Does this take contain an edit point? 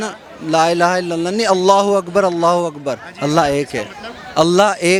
no; 0 cuts

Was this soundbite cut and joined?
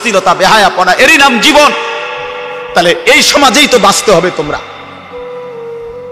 yes; 1 cut; at 5.2 s

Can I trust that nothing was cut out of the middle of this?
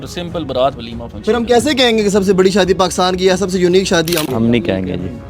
no; 1 cut; at 4.2 s

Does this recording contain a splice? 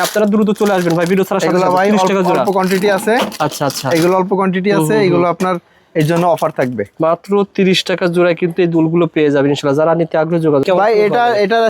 yes; 1 cut; at 10.6 s

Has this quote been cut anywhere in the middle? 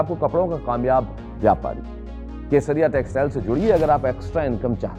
no; 0 cuts

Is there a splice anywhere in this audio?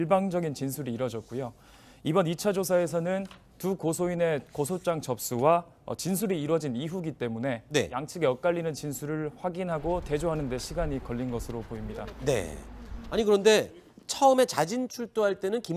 no; 0 cuts

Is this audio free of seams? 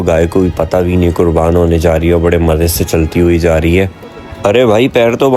yes; 0 cuts

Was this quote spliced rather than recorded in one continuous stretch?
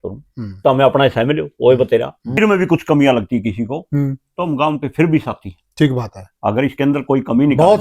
yes; 1 cut; at 2.4 s

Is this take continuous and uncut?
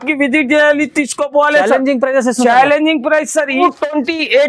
no; 1 cut; at 3.6 s

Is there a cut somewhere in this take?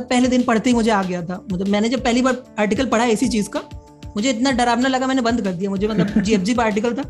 no; 0 cuts

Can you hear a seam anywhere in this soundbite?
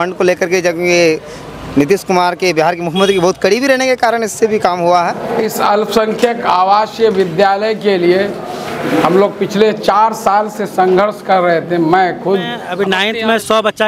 yes; 2 cuts; at 5.4 s, 12.6 s

